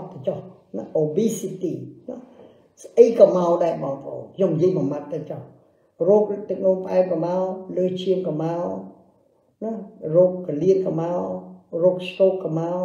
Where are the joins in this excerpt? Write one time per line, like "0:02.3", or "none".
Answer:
none